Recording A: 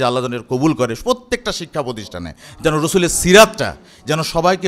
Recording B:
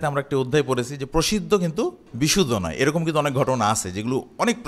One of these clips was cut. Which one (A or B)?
B